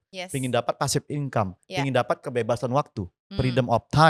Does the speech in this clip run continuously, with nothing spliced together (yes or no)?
yes